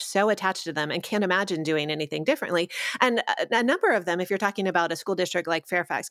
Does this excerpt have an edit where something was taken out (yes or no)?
no